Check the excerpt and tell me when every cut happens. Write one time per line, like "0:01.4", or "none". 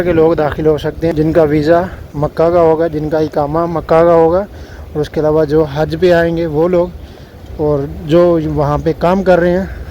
0:01.1